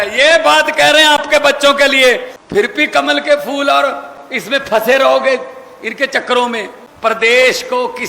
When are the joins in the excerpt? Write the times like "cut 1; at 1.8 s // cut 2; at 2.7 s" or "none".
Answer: cut 1; at 2.3 s // cut 2; at 6.8 s